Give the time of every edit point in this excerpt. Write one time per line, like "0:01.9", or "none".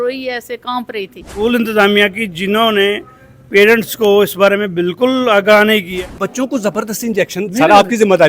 0:01.4
0:05.9